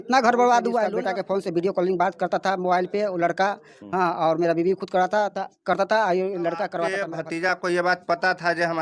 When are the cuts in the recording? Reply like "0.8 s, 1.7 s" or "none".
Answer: 0.9 s, 7.0 s